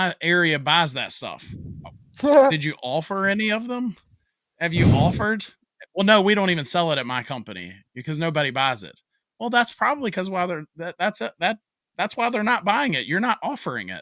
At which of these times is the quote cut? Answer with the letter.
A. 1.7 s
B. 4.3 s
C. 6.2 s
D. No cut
D